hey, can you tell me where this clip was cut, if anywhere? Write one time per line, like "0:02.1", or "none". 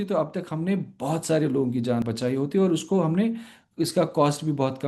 0:02.0